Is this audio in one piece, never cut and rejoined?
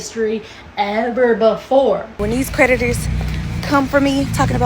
no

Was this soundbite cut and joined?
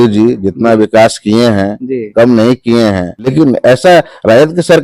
yes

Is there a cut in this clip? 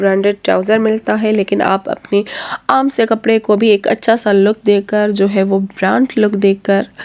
no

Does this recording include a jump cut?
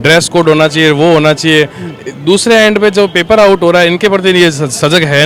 no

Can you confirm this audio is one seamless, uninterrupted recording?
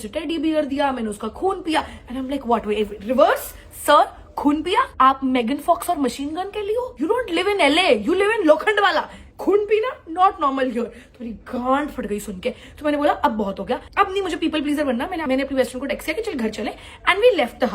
yes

